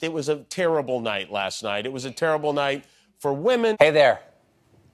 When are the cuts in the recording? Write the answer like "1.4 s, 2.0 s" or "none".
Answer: 3.8 s